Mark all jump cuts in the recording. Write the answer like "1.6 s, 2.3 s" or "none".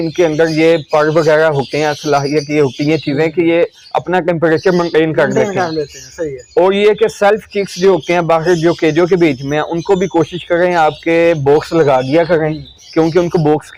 none